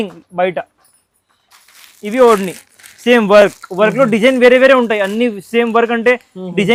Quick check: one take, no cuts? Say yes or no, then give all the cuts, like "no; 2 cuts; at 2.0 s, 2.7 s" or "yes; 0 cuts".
yes; 0 cuts